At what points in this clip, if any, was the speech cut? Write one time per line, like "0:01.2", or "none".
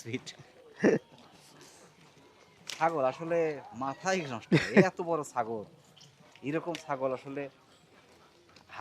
none